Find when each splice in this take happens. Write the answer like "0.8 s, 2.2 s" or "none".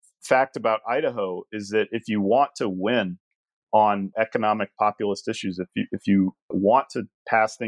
4.1 s